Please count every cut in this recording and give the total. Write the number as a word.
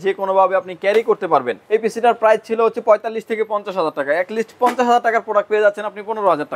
one